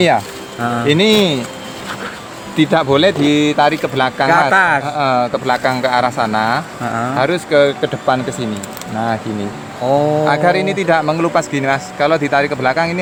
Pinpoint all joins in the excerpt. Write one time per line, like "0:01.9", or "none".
none

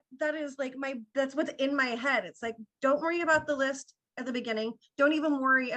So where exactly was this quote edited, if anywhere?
0:01.0

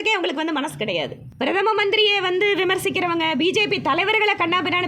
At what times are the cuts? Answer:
0:01.2

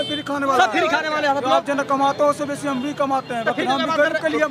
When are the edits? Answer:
none

